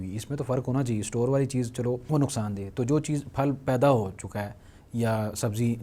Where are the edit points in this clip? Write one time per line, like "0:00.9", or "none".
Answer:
none